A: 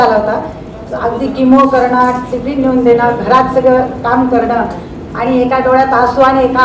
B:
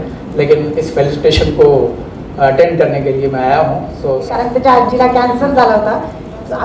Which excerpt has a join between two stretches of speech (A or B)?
B